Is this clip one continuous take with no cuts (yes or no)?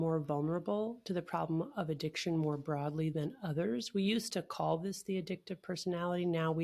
yes